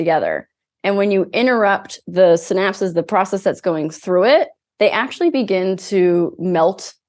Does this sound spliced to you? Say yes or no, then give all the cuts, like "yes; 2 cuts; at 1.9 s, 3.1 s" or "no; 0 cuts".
no; 0 cuts